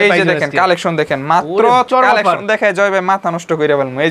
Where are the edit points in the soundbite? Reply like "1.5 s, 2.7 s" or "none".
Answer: 1.9 s